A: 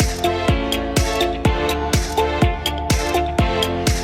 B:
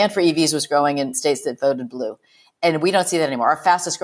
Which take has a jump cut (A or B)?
B